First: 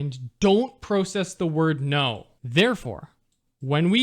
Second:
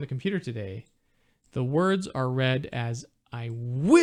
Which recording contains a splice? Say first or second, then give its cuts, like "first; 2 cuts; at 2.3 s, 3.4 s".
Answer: first; 1 cut; at 2.3 s